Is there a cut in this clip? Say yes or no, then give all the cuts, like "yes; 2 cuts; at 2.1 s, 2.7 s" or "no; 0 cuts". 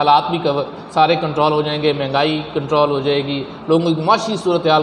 no; 0 cuts